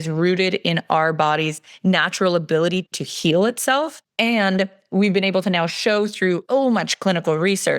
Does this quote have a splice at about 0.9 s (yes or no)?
no